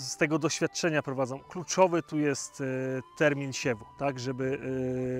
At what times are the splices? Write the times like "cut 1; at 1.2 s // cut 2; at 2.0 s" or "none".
none